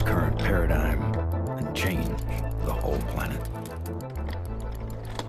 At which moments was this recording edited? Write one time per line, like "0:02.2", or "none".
none

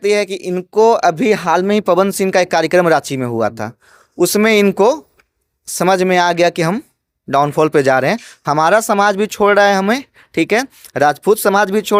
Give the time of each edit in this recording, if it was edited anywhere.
none

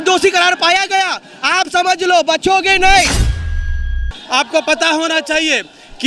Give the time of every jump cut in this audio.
0:03.7

